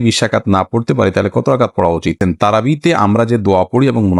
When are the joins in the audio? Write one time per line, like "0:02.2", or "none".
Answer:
0:02.2